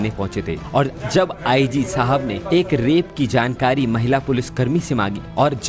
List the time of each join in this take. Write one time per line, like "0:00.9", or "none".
none